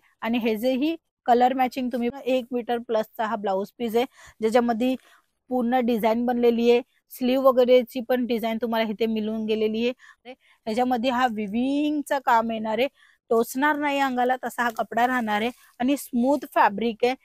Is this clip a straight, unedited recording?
no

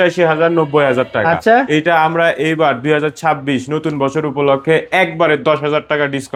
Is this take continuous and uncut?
yes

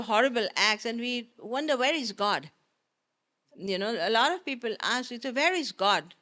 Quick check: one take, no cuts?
yes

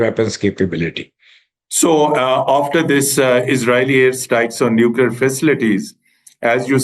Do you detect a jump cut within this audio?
no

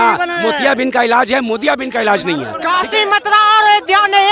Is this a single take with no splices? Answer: no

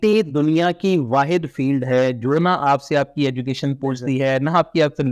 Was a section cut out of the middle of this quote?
no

